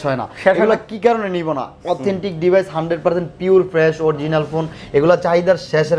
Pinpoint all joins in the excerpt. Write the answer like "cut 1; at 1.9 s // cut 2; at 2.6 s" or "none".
none